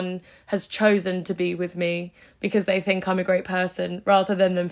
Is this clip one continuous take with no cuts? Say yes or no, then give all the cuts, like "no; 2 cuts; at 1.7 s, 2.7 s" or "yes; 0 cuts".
yes; 0 cuts